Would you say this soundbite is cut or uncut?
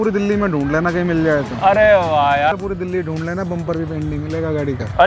cut